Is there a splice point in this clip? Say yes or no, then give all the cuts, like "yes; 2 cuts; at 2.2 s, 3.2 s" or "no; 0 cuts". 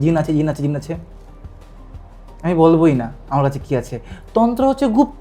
no; 0 cuts